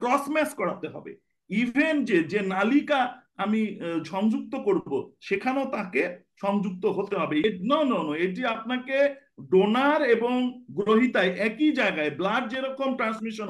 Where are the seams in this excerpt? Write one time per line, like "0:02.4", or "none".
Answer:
0:07.4